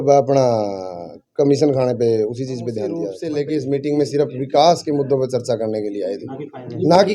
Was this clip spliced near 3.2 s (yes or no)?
yes